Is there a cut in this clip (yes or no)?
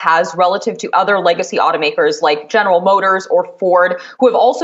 no